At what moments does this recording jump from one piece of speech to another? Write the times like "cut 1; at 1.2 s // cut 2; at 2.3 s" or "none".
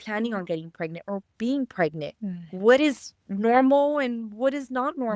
none